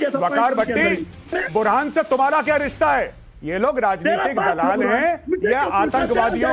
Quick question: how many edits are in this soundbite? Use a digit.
1